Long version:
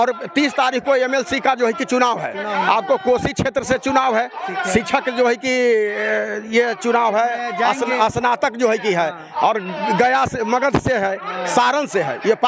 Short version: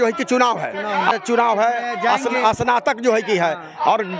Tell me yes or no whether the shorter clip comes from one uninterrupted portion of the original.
no